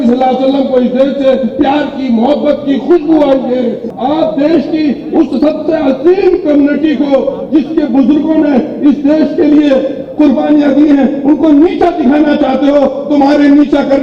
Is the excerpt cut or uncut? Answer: cut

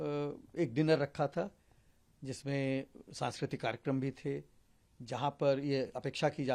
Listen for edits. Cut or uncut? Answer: uncut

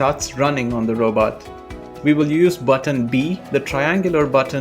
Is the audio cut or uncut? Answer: cut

